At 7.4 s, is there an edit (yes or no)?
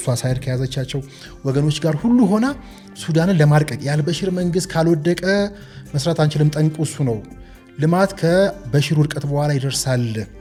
no